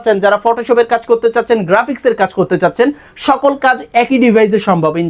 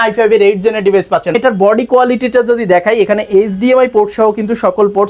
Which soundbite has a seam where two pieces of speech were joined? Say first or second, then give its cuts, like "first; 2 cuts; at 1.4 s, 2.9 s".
second; 1 cut; at 1.4 s